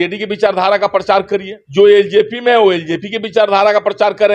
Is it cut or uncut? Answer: cut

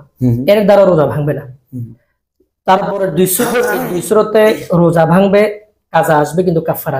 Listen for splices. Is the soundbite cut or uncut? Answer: uncut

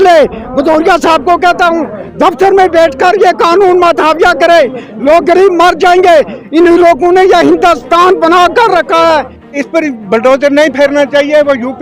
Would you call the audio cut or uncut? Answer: cut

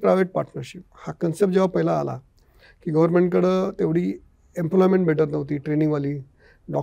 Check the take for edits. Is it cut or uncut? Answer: uncut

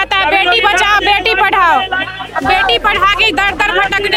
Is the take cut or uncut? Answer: uncut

